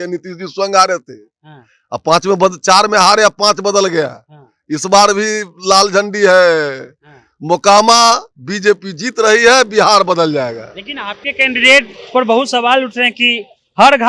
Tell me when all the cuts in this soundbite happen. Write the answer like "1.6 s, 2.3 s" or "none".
none